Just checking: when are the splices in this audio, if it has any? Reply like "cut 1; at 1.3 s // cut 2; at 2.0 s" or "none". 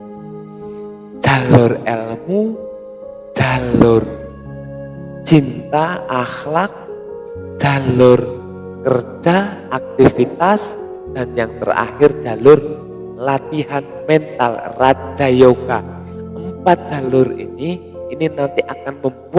none